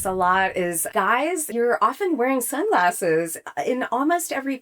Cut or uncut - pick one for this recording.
cut